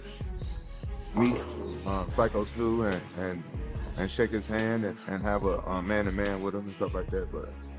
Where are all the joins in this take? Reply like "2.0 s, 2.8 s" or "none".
none